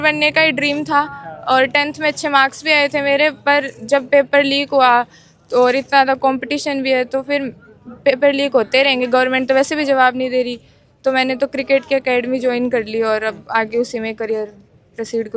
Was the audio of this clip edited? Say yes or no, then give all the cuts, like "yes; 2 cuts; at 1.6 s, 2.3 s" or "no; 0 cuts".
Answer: no; 0 cuts